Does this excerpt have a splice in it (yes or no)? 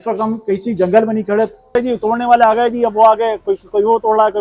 yes